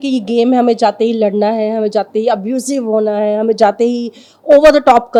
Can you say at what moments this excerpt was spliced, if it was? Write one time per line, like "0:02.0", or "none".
none